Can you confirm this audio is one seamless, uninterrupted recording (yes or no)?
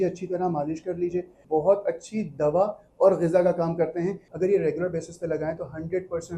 no